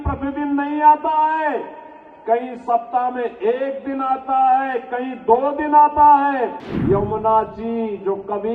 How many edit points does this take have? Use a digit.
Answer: 1